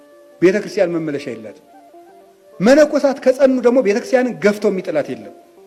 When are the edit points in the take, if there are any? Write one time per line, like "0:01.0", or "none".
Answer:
none